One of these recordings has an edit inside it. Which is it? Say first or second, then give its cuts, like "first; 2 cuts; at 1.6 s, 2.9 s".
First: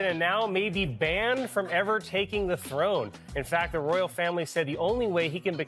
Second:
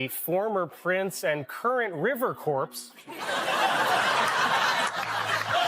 second; 1 cut; at 4.5 s